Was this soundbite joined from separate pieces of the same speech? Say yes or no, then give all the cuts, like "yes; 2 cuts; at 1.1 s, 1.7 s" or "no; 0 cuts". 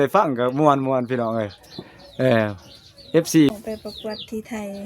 yes; 1 cut; at 3.5 s